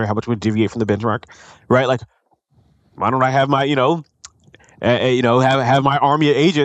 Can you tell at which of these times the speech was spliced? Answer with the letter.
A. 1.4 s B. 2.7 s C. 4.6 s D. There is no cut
D